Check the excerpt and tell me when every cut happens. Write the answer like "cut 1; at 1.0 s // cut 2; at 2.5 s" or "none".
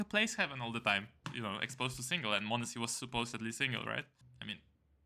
cut 1; at 1.2 s // cut 2; at 4.2 s